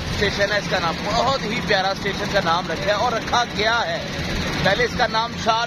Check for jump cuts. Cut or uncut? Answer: uncut